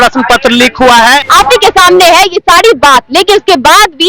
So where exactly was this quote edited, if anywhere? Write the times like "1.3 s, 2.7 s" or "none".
1.2 s